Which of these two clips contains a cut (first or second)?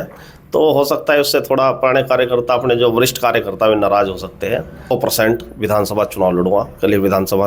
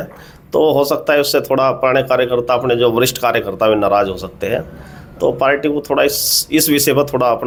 first